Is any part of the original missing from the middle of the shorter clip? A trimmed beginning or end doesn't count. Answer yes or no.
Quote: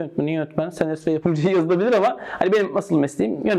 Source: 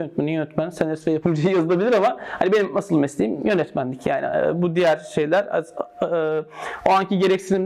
no